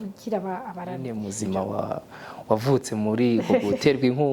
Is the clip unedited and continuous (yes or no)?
no